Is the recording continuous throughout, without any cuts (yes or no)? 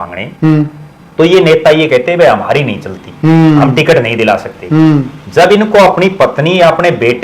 yes